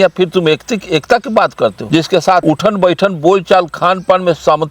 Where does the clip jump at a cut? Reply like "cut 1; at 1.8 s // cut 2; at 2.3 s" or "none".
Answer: cut 1; at 2.2 s